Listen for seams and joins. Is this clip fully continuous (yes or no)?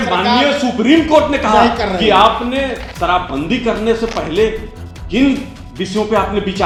yes